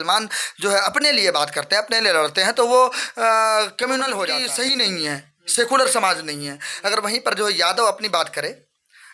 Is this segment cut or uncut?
cut